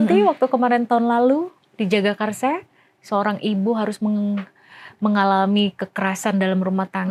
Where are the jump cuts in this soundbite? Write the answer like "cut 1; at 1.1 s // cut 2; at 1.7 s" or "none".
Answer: none